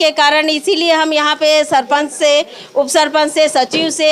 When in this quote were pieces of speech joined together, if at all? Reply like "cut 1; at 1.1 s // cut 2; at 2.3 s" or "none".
none